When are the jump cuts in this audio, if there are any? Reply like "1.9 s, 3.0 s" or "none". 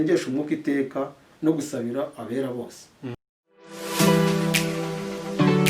3.2 s